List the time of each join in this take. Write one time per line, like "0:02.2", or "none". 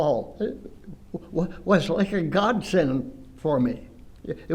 none